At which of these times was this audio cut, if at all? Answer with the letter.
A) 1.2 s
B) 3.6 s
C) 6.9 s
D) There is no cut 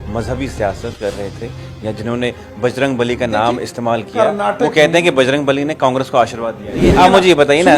C